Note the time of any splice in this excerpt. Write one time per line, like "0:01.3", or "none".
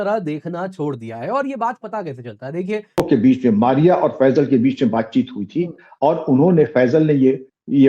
0:03.0